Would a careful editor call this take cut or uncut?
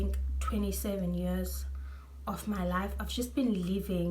uncut